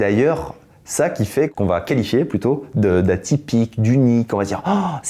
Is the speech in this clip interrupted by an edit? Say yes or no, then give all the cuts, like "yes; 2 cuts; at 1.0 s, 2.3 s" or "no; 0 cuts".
yes; 1 cut; at 1.5 s